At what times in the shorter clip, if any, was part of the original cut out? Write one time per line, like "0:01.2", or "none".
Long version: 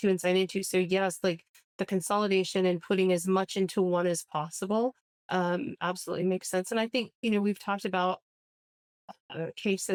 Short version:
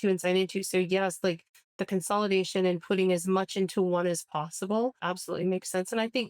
0:05.0